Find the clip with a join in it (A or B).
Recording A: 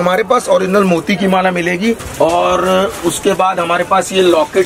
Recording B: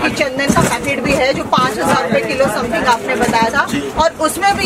A